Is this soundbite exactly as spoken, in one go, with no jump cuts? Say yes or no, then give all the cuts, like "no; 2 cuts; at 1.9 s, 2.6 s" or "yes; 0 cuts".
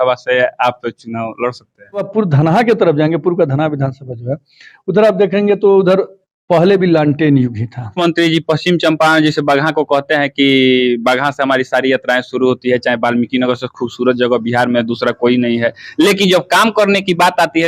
no; 2 cuts; at 2.1 s, 7.9 s